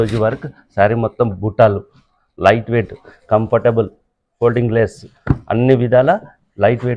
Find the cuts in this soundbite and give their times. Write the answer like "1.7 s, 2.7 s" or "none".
none